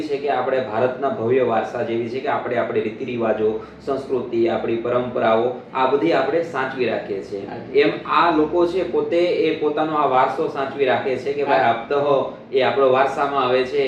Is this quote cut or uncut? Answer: uncut